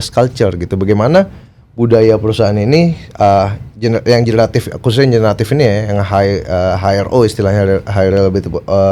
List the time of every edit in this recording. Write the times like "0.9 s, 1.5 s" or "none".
none